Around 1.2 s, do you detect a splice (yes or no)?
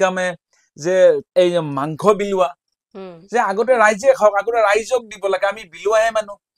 yes